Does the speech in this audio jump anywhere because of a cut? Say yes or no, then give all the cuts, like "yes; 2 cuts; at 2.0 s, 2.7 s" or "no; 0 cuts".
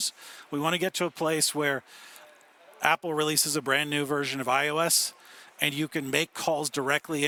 no; 0 cuts